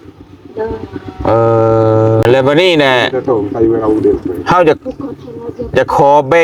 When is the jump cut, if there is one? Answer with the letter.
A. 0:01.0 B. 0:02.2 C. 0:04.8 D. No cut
B